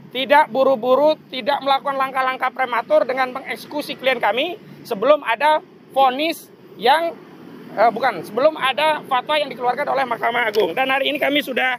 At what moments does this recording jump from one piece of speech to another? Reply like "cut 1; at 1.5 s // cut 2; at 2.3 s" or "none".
none